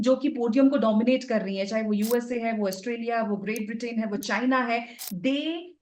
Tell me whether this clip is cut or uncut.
uncut